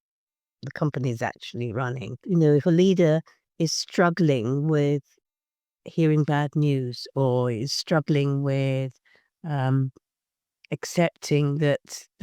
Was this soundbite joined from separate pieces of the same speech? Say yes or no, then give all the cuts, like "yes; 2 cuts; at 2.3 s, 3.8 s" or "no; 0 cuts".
yes; 1 cut; at 2.2 s